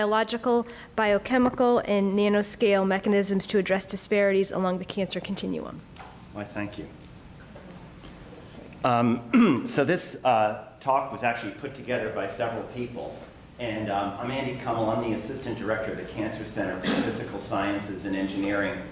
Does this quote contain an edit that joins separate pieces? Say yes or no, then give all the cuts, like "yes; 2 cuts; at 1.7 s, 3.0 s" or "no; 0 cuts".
no; 0 cuts